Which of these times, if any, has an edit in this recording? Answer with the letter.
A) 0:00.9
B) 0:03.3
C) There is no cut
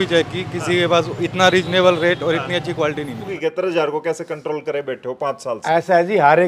B